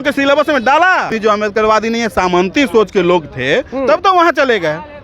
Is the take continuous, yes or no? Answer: no